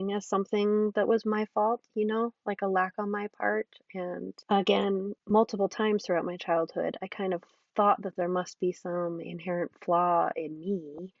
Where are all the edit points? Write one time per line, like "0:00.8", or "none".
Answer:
0:04.4
0:05.2